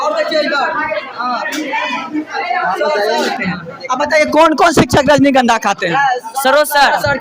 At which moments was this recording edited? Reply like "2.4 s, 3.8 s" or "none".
3.3 s